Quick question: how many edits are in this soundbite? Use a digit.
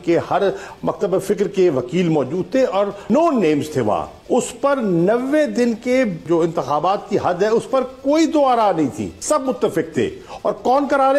4